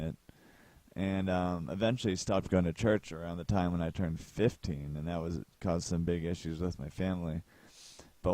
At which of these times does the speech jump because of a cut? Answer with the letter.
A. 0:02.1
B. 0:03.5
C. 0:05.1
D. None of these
C